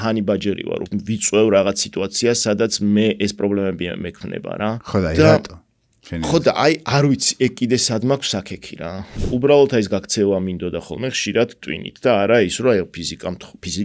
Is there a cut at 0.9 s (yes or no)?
yes